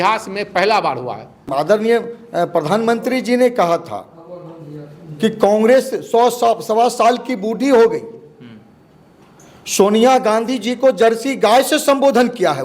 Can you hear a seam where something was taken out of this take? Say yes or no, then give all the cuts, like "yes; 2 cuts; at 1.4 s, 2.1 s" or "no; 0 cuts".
yes; 1 cut; at 1.5 s